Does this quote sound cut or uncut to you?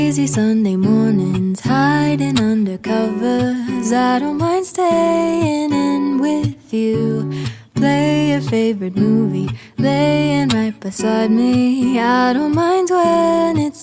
cut